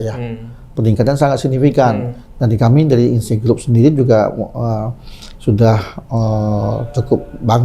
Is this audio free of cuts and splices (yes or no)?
yes